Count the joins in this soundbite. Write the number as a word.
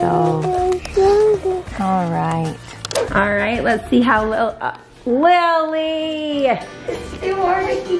zero